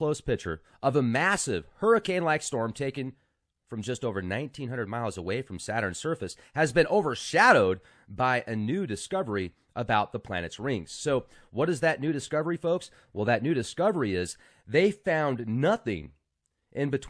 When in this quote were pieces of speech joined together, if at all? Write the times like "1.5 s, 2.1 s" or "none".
9.7 s